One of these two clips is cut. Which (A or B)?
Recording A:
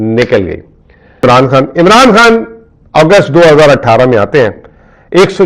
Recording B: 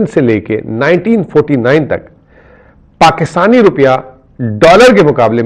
A